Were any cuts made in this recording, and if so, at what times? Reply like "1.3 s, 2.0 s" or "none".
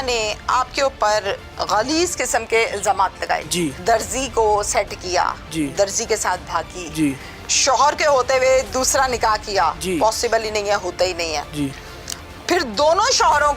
3.8 s